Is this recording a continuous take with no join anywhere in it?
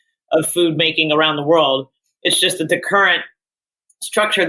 yes; 0 cuts

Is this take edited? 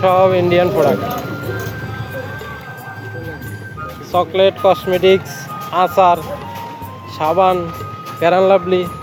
no; 0 cuts

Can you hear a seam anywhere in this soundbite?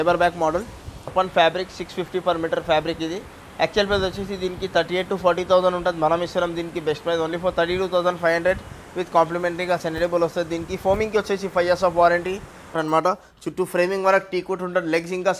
yes; 2 cuts; at 1.1 s, 12.8 s

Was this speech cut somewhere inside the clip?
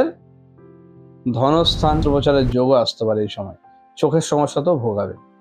yes; 1 cut; at 2.0 s

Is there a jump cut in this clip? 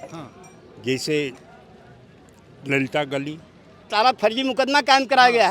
yes; 1 cut; at 3.9 s

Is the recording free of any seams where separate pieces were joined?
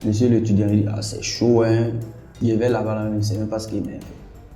no; 1 cut; at 2.3 s

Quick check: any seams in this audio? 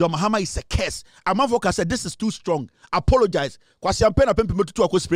no; 0 cuts

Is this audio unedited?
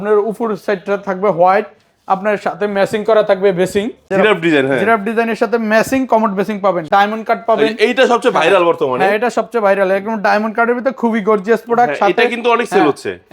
no; 2 cuts; at 4.0 s, 6.9 s

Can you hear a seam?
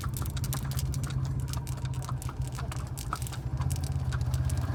no; 0 cuts

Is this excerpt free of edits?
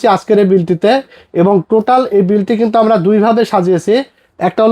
yes; 0 cuts

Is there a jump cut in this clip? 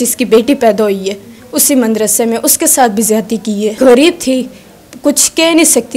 yes; 1 cut; at 3.8 s

